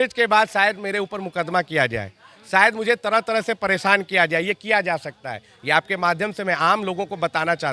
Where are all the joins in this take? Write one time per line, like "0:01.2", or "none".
none